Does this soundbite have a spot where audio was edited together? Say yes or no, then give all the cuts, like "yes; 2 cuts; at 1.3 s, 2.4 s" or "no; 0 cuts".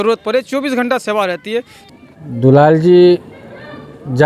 yes; 1 cut; at 1.7 s